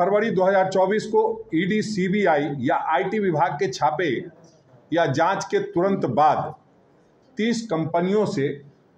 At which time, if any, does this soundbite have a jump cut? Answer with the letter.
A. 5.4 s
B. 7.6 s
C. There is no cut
C